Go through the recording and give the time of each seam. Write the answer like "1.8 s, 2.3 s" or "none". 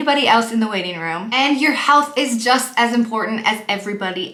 none